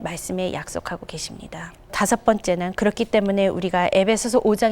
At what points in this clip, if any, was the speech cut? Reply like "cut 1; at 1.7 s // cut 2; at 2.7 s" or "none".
cut 1; at 2.0 s